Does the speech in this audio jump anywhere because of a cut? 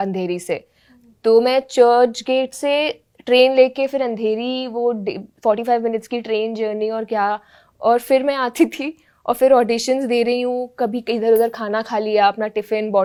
no; 0 cuts

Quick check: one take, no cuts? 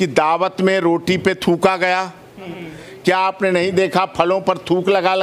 no; 1 cut; at 2.6 s

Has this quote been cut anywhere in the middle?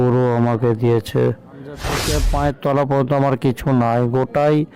yes; 1 cut; at 2.1 s

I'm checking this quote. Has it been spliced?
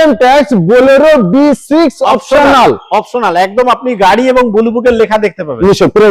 no; 0 cuts

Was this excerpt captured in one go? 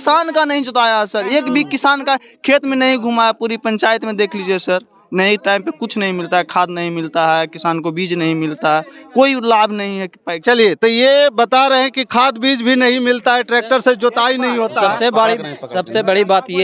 yes; 0 cuts

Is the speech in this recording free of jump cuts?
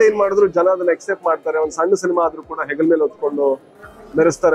yes; 0 cuts

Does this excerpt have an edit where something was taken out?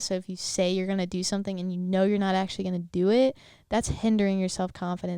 no; 0 cuts

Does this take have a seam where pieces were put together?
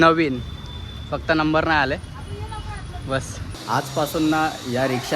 yes; 1 cut; at 3.5 s

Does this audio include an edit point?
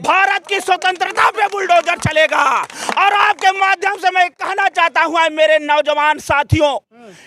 no; 0 cuts

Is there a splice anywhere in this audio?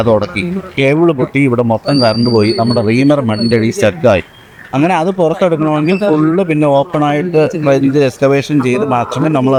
no; 0 cuts

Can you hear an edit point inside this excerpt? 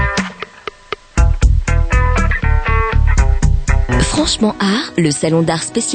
yes; 1 cut; at 3.9 s

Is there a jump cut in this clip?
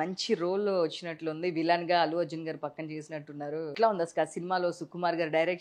yes; 1 cut; at 3.7 s

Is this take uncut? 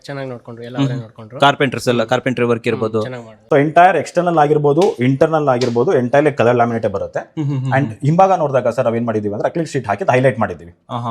no; 1 cut; at 3.3 s

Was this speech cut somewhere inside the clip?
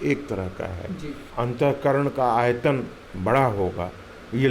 yes; 1 cut; at 1.2 s

